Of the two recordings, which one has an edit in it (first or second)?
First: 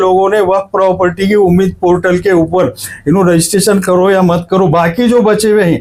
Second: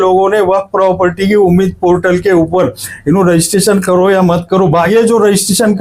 second